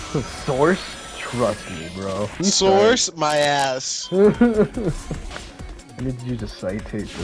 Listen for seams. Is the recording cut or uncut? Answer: cut